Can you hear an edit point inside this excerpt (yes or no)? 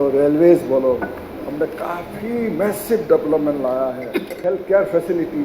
yes